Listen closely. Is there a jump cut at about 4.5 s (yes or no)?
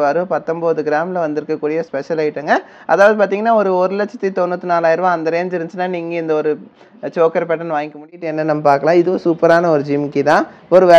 no